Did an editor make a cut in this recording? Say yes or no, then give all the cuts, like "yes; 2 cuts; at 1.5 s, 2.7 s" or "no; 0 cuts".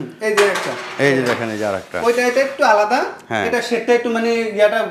no; 0 cuts